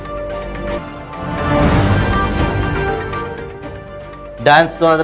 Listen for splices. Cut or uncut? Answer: uncut